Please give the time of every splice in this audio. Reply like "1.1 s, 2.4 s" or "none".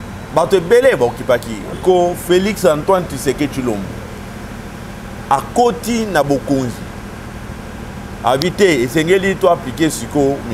1.8 s